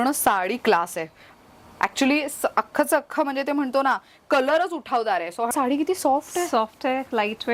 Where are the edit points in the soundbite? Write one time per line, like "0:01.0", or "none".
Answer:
0:05.5